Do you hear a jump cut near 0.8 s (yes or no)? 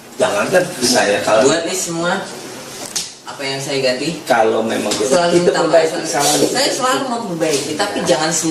yes